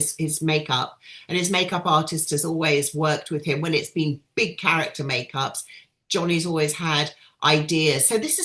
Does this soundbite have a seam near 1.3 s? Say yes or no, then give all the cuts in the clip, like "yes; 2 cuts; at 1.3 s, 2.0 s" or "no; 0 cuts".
no; 0 cuts